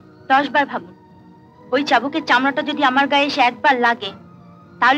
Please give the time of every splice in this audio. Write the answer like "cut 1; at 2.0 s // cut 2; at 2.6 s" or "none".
none